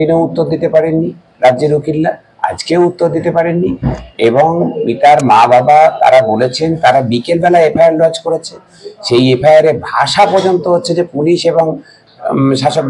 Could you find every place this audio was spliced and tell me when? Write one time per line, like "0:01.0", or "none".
none